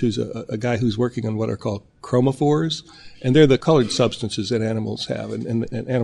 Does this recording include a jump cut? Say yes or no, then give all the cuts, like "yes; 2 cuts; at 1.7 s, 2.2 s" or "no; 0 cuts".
yes; 1 cut; at 3.6 s